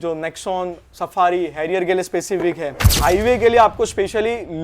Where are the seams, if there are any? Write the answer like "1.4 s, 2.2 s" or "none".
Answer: 2.9 s